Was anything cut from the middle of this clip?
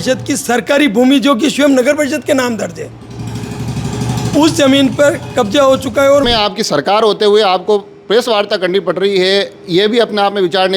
yes; 1 cut; at 6.2 s

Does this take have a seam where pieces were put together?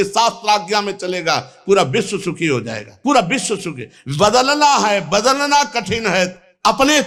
no; 0 cuts

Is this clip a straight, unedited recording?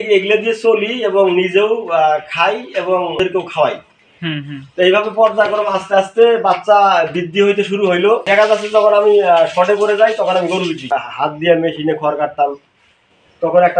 no; 3 cuts; at 3.2 s, 8.3 s, 10.9 s

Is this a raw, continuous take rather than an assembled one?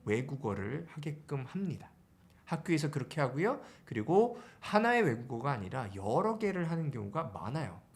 yes; 0 cuts

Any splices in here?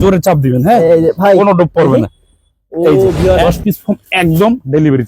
yes; 1 cut; at 3.4 s

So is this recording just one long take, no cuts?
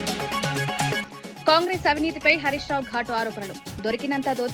no; 1 cut; at 1.0 s

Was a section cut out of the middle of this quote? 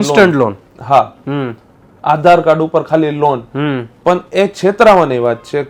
no; 0 cuts

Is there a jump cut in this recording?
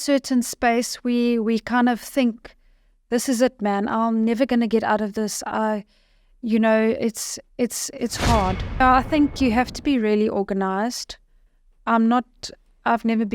yes; 1 cut; at 8.8 s

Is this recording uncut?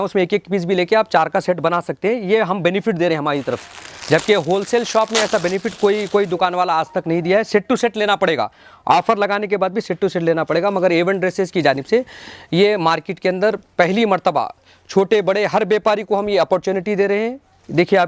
yes; 0 cuts

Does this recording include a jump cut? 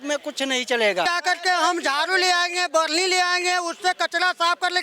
yes; 1 cut; at 1.1 s

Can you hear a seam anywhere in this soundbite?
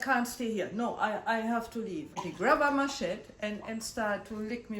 yes; 1 cut; at 2.1 s

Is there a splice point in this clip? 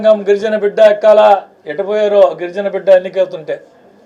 no; 0 cuts

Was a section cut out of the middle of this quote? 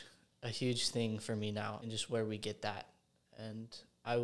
yes; 1 cut; at 1.8 s

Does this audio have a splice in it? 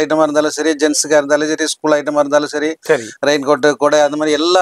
no; 0 cuts

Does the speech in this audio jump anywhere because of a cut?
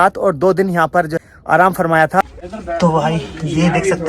yes; 2 cuts; at 1.2 s, 2.3 s

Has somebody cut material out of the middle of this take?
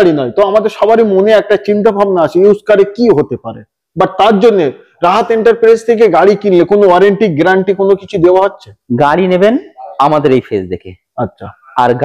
no; 0 cuts

